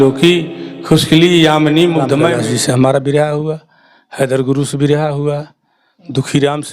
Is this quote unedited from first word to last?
no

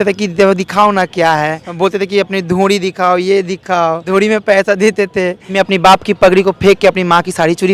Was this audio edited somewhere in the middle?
yes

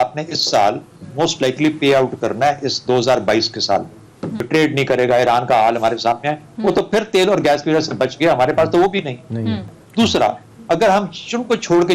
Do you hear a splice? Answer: yes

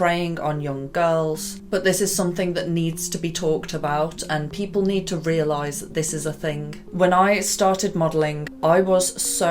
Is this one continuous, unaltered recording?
yes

